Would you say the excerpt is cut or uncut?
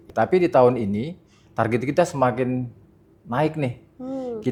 uncut